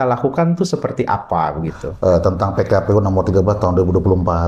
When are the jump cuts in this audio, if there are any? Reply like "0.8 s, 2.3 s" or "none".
1.8 s